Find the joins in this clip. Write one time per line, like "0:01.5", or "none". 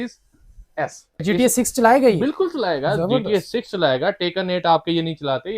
0:01.2